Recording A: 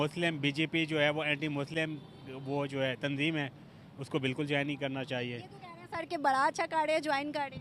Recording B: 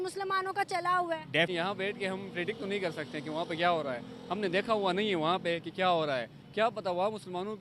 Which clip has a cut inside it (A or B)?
B